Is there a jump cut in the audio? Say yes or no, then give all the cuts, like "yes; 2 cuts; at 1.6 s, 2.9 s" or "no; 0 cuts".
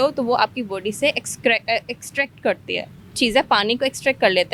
no; 0 cuts